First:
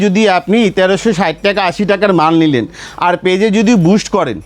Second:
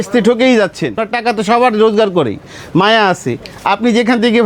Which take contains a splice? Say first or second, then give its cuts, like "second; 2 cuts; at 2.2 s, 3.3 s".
second; 1 cut; at 1.0 s